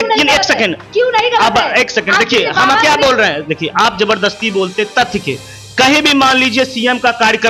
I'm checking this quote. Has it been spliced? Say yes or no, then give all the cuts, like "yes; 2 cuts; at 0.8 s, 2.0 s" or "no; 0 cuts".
no; 0 cuts